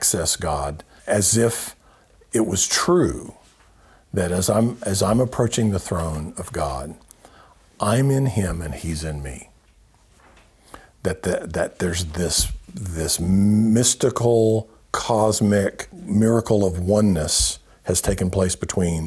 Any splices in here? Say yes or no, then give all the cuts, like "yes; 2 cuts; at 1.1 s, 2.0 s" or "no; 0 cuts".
yes; 2 cuts; at 0.9 s, 16.0 s